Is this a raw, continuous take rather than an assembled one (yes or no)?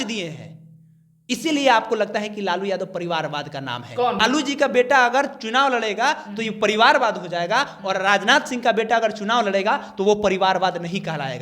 no